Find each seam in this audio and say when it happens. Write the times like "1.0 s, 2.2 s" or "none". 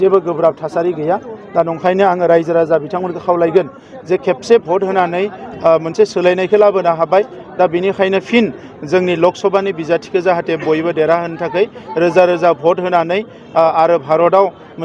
none